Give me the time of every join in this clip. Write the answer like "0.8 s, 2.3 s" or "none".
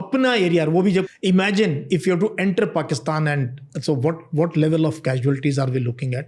1.1 s

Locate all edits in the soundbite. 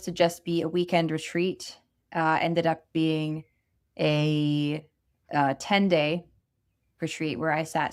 none

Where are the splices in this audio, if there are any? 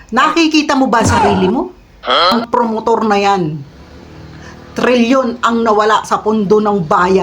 2.3 s

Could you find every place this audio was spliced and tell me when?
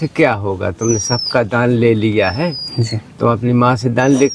none

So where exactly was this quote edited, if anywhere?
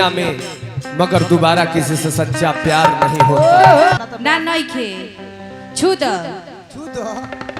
4.0 s

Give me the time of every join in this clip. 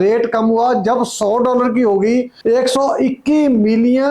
2.3 s

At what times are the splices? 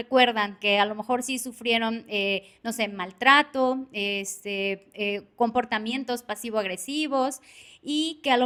none

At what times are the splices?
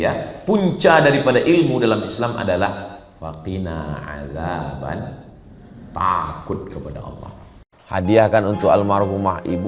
7.7 s

